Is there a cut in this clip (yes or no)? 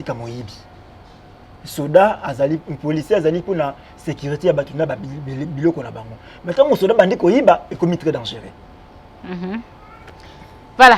no